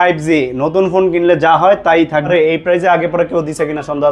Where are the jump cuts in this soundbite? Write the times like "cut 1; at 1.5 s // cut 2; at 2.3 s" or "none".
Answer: cut 1; at 2.2 s